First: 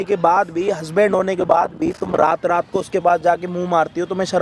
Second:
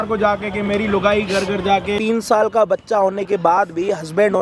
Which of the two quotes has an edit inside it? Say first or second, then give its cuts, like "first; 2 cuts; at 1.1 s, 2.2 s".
second; 1 cut; at 2.0 s